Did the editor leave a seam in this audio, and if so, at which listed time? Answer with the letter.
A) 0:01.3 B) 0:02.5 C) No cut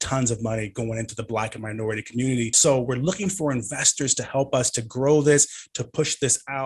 B